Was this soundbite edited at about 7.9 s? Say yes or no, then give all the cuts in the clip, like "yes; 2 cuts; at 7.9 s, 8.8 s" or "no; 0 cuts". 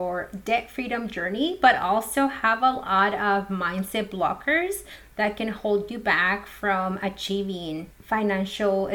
yes; 1 cut; at 7.9 s